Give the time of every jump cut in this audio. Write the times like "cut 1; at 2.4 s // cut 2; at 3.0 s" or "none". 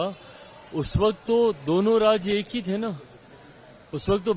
none

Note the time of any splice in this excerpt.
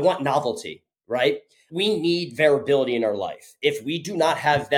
none

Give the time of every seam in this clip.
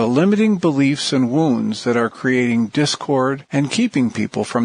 cut 1; at 3.4 s

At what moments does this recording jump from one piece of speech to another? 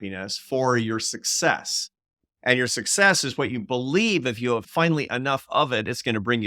cut 1; at 4.7 s

